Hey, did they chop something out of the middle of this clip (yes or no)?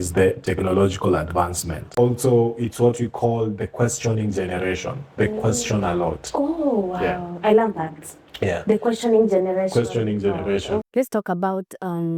yes